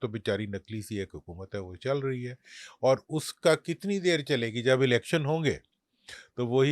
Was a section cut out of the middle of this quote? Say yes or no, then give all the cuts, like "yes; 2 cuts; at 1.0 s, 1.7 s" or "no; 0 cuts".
no; 0 cuts